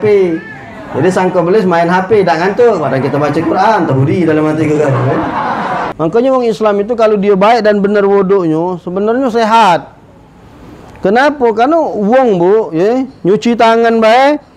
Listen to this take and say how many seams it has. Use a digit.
1